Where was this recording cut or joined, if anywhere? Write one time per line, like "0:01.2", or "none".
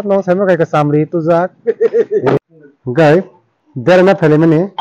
0:02.4